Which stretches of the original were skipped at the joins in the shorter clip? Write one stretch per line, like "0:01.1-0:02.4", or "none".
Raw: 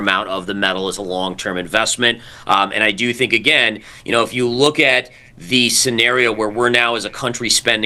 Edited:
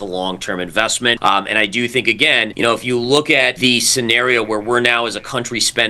0:02.1-0:02.4
0:03.7-0:04.0
0:05.0-0:05.4